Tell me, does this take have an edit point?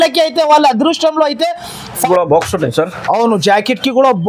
yes; 1 cut; at 2.0 s

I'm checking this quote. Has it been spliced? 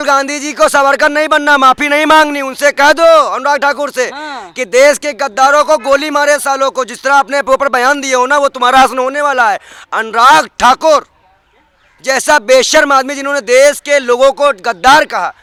no; 0 cuts

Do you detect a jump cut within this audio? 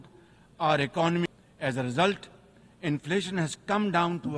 yes; 1 cut; at 1.3 s

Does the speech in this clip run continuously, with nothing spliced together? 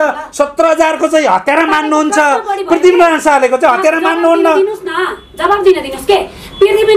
yes; 0 cuts

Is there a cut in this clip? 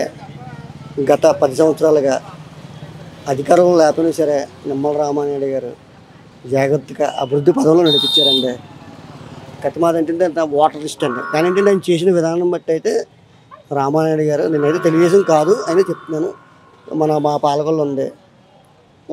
no; 0 cuts

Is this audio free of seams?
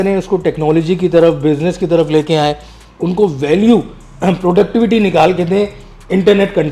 yes; 0 cuts

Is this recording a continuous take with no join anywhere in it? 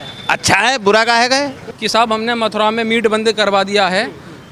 no; 1 cut; at 1.6 s

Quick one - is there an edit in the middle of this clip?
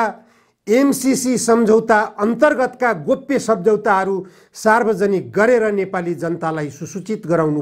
no; 0 cuts

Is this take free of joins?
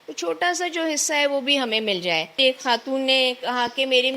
no; 1 cut; at 2.4 s

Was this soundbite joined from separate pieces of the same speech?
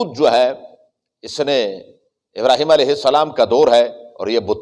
no; 0 cuts

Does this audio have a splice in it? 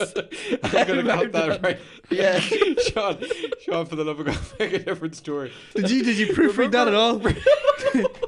yes; 1 cut; at 5.7 s

